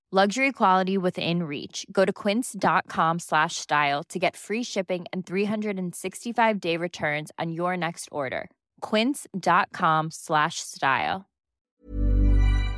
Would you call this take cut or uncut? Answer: cut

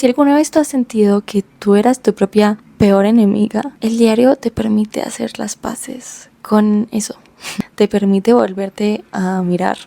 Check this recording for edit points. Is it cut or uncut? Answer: cut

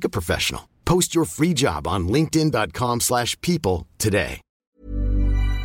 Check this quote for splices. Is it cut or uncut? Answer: cut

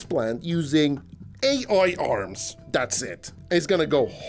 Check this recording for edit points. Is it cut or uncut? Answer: uncut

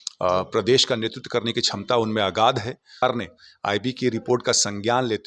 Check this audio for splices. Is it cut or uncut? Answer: cut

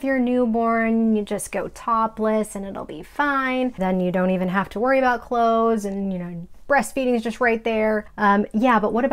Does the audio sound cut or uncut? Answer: cut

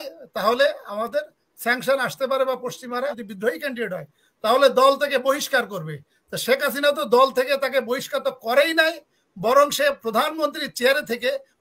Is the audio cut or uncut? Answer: cut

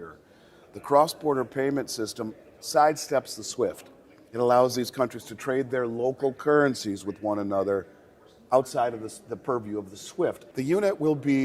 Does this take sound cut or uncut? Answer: cut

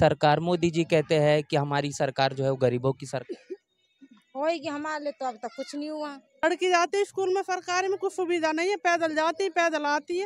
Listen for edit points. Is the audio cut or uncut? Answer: cut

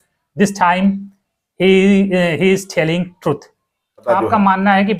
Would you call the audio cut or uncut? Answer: cut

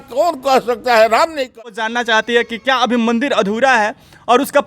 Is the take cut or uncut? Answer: cut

